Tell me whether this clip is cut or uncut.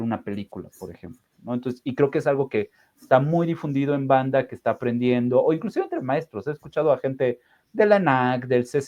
uncut